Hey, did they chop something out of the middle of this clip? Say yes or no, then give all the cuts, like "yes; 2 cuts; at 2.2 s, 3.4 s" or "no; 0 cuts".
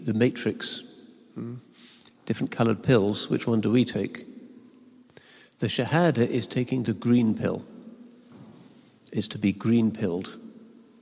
no; 0 cuts